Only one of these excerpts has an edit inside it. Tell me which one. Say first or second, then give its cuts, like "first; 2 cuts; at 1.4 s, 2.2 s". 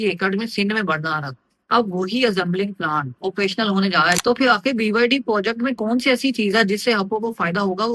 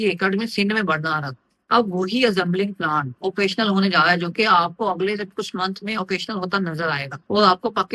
first; 1 cut; at 4.2 s